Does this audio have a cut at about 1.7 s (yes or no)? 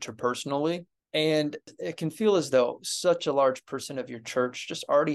yes